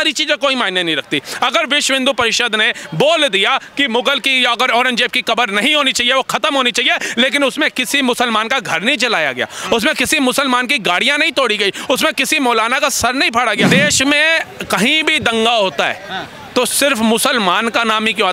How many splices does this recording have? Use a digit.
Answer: 1